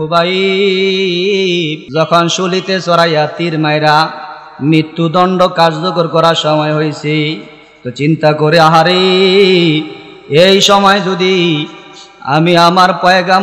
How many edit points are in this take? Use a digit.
1